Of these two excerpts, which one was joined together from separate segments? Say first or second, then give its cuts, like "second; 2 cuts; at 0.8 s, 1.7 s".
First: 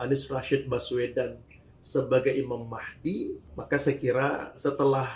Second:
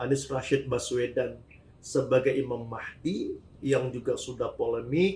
first; 1 cut; at 3.5 s